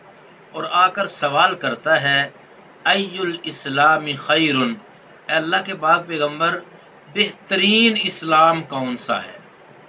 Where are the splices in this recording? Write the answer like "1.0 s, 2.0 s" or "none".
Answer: none